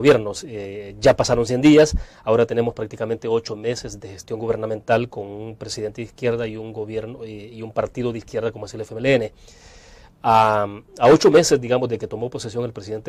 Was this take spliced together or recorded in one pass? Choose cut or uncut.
uncut